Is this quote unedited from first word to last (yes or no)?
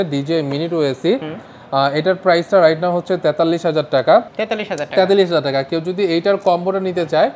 yes